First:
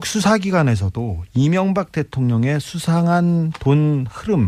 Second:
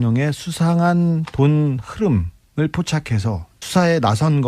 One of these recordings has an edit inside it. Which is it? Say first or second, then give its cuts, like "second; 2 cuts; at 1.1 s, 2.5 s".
second; 1 cut; at 3.5 s